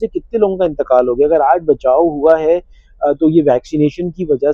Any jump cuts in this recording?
no; 0 cuts

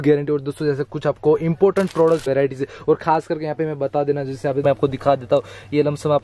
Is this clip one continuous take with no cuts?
no; 2 cuts; at 2.2 s, 4.6 s

